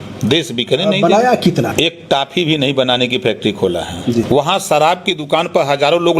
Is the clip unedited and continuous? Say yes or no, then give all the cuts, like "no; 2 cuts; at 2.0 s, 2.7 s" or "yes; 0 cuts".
no; 2 cuts; at 1.7 s, 4.3 s